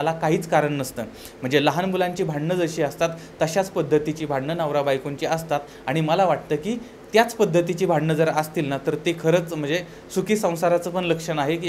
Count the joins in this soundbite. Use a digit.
0